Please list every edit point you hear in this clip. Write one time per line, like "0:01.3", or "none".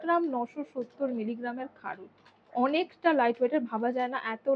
none